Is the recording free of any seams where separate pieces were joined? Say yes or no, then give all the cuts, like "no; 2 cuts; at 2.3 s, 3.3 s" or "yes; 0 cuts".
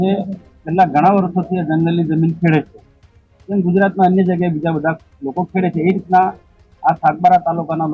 yes; 0 cuts